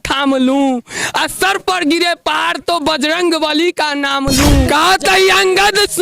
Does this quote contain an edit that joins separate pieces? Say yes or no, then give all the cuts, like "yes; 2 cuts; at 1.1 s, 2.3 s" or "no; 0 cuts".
yes; 1 cut; at 4.7 s